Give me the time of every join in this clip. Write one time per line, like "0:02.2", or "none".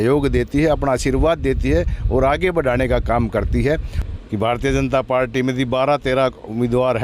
0:03.9